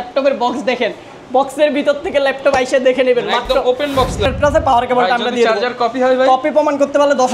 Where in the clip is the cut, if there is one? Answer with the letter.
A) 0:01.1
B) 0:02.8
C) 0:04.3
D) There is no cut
C